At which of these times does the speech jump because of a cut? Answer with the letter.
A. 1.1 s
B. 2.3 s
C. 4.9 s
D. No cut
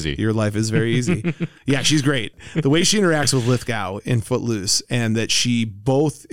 B